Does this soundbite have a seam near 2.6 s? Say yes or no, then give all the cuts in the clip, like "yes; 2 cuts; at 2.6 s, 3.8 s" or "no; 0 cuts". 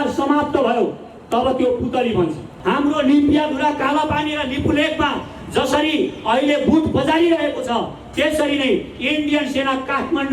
yes; 1 cut; at 2.6 s